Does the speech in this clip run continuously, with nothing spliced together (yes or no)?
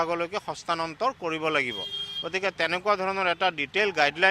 yes